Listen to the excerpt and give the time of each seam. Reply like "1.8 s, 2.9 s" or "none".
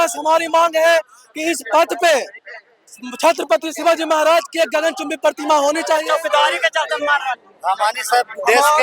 6.0 s